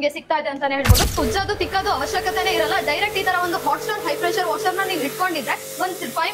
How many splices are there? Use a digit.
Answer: 1